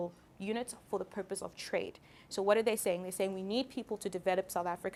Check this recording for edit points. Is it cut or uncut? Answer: uncut